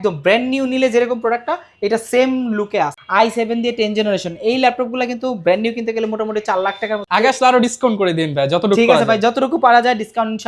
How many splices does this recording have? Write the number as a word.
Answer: two